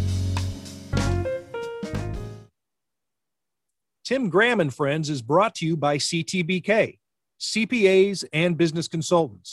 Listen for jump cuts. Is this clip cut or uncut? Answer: cut